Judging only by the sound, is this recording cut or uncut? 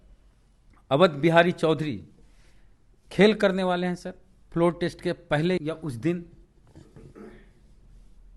uncut